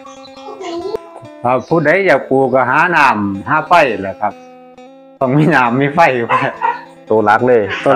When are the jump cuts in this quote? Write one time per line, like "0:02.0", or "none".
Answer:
0:00.9